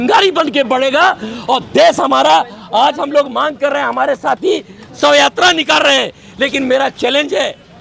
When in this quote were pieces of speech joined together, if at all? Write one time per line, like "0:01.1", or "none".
none